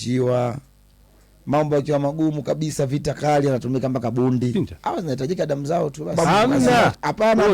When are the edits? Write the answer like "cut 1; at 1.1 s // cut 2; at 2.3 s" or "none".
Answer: cut 1; at 4.5 s // cut 2; at 6.1 s

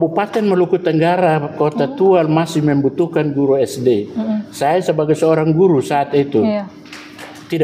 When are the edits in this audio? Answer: none

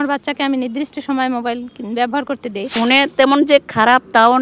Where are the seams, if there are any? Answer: cut 1; at 2.7 s

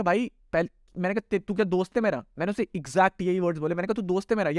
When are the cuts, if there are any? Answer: none

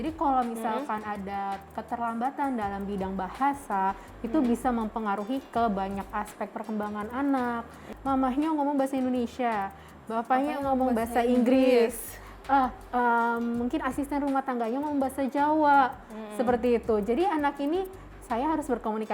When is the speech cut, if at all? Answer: cut 1; at 7.9 s

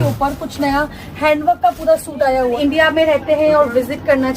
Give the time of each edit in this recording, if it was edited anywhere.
cut 1; at 2.5 s

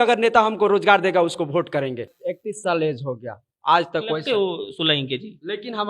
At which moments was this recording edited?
cut 1; at 2.2 s

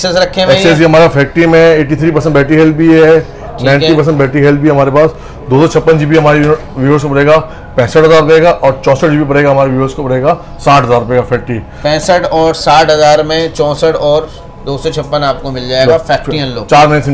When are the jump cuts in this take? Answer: none

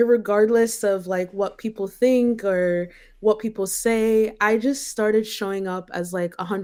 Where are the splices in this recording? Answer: none

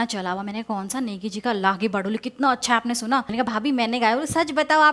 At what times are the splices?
cut 1; at 3.3 s

